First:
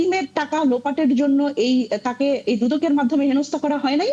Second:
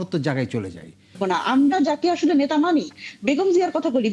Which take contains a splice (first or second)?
second